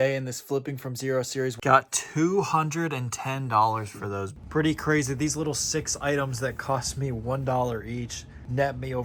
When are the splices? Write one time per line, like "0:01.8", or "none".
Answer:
0:01.6
0:04.3

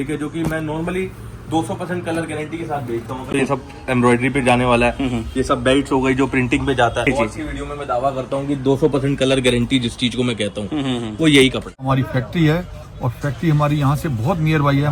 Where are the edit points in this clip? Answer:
0:03.3
0:07.1
0:11.7

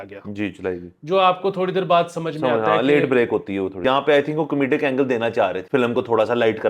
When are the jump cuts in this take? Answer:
0:03.8
0:05.6

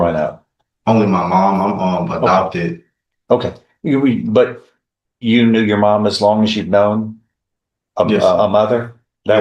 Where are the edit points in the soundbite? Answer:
none

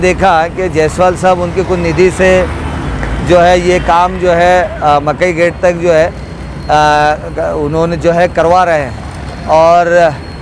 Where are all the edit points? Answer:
none

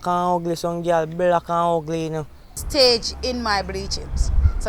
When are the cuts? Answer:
0:02.6

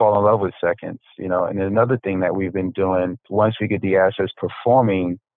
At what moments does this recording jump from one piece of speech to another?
0:03.2

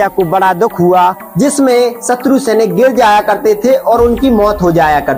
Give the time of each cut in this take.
0:01.2

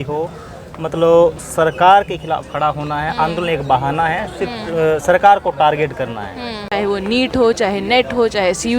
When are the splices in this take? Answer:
0:06.6

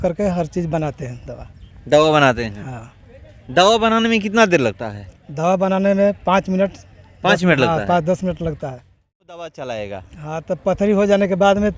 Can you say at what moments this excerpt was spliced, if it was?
0:09.4

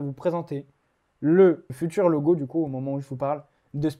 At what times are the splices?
0:01.7

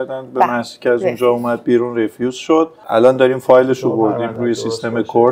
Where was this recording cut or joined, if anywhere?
0:04.3

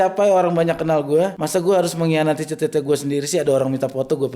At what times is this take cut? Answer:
0:01.4

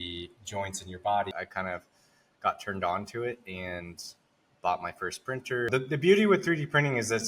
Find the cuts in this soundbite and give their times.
0:01.3
0:05.7

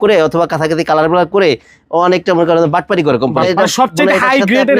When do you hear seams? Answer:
0:03.5

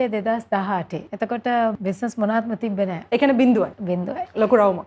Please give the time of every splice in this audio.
0:01.0
0:01.8
0:03.0
0:03.8

